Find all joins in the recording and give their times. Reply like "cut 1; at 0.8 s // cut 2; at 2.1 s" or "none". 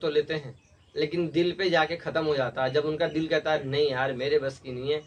none